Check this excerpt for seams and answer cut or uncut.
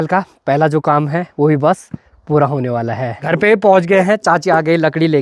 uncut